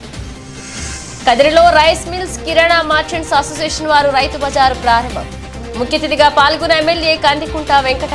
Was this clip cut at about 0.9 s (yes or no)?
yes